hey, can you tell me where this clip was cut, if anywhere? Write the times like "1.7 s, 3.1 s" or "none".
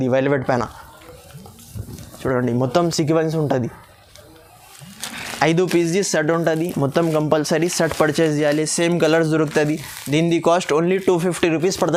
none